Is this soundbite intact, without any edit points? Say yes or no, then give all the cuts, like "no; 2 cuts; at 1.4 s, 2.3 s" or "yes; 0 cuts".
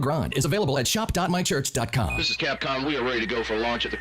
no; 1 cut; at 2.1 s